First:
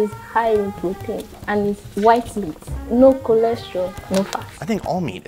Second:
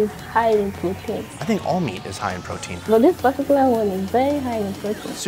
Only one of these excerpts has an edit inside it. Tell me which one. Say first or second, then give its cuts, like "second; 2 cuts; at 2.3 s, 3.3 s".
second; 2 cuts; at 1.3 s, 2.8 s